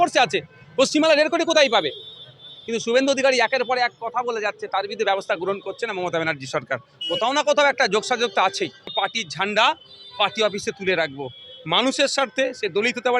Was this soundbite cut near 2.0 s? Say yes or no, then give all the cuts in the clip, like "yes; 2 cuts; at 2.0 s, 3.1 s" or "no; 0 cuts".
no; 1 cut; at 8.9 s